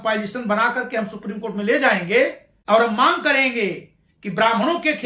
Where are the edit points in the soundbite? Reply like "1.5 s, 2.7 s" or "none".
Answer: 2.5 s